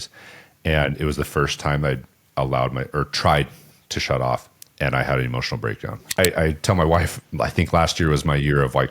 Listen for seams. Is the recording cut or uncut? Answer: cut